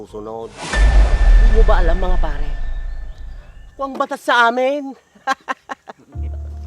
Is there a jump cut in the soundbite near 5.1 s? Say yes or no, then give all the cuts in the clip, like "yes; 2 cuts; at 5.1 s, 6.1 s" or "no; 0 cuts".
no; 0 cuts